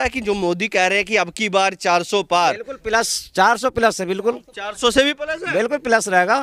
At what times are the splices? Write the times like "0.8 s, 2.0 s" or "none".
none